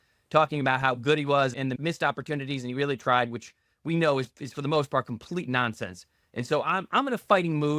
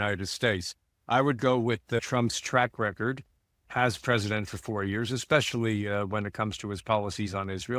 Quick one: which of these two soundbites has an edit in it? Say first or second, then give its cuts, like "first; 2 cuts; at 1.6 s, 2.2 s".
first; 1 cut; at 1.7 s